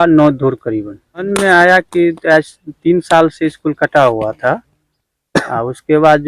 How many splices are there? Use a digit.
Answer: 1